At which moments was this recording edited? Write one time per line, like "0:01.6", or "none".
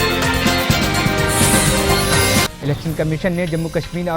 0:02.5